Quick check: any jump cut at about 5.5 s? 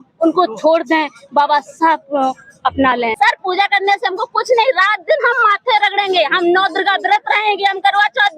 no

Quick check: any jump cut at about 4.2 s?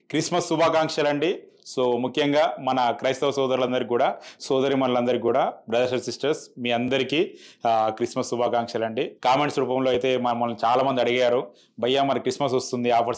no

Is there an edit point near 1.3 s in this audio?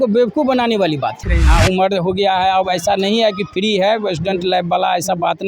yes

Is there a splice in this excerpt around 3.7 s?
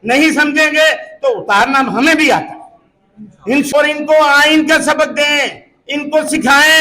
yes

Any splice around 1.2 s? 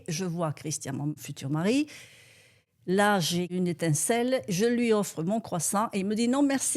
yes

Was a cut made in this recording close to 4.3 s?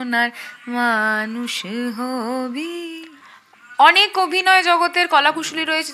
no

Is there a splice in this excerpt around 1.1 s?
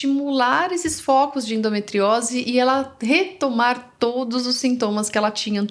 no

